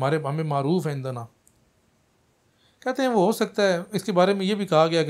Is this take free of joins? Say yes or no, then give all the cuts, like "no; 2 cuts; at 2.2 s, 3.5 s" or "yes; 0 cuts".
yes; 0 cuts